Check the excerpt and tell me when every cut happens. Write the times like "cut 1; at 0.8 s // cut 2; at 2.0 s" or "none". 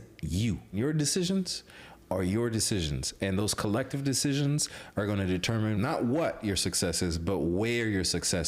cut 1; at 0.7 s // cut 2; at 5.7 s